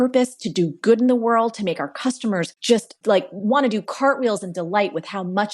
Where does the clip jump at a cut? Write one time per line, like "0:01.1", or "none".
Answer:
0:02.7